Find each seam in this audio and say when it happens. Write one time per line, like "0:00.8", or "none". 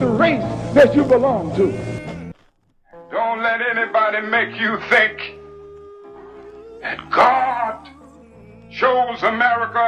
0:02.3